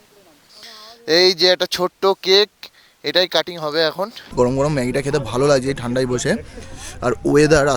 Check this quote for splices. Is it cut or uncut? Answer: cut